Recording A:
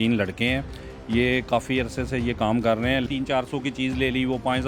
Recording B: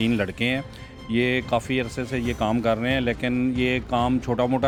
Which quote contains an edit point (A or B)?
A